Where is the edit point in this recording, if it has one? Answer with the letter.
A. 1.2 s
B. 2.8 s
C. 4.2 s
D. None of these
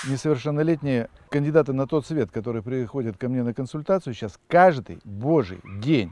A